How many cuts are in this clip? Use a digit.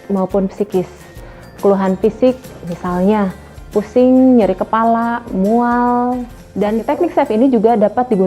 1